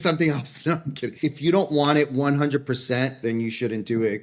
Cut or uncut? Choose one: cut